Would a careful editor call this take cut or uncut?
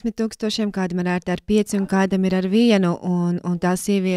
uncut